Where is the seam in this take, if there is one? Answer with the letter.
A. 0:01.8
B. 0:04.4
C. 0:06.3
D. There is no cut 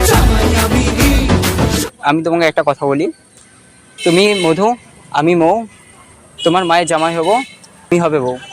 A